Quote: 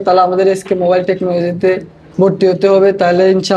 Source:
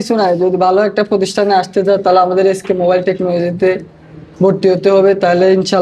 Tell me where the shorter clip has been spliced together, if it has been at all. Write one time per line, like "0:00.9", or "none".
0:02.0